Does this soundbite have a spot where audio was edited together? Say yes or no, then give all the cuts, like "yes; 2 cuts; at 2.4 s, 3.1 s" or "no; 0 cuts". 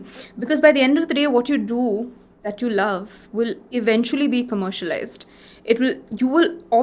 no; 0 cuts